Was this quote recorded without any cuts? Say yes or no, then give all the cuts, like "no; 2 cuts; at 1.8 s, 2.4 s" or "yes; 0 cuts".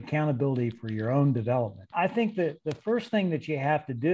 no; 1 cut; at 1.9 s